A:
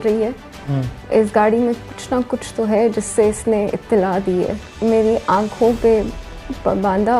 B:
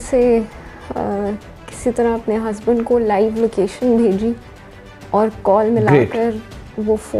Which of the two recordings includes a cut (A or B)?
A